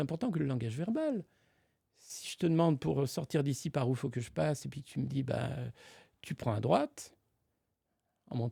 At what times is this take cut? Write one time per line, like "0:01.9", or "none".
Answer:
none